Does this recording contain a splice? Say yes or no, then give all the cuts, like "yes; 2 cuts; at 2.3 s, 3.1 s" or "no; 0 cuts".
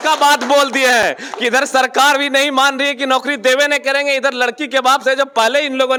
no; 0 cuts